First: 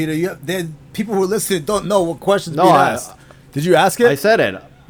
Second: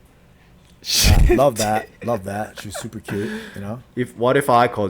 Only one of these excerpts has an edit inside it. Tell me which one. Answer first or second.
second